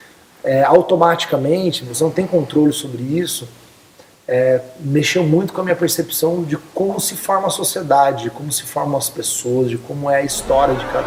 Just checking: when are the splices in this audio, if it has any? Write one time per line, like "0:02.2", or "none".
none